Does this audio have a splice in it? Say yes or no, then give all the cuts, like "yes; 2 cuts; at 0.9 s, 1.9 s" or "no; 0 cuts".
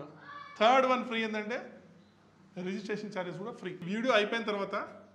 yes; 1 cut; at 3.8 s